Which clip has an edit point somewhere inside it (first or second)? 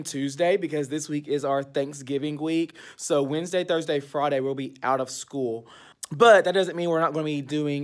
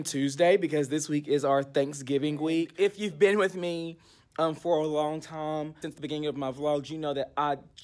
second